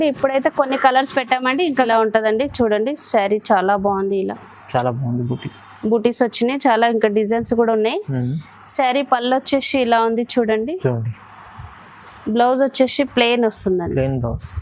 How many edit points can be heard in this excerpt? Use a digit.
1